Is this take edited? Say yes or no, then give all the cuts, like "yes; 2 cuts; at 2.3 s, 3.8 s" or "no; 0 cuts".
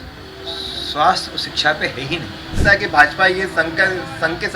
yes; 1 cut; at 2.6 s